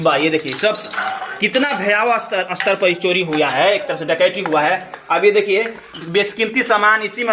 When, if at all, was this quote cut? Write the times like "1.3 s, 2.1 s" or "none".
none